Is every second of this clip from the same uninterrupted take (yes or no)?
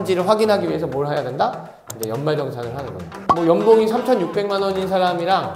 no